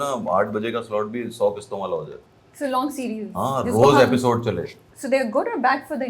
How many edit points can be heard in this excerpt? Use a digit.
0